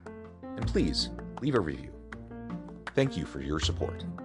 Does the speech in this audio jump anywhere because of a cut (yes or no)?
no